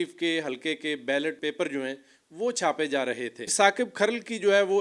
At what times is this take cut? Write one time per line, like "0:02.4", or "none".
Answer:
0:01.4
0:03.5